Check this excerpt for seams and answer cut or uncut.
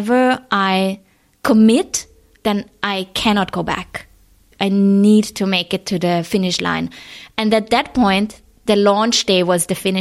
cut